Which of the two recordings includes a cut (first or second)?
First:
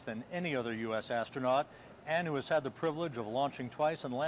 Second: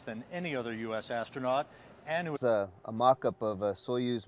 first